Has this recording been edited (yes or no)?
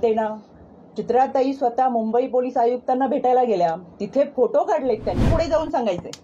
yes